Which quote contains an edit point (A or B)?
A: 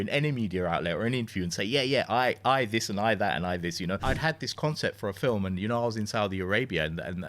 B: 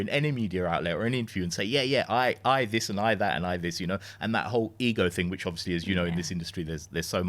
A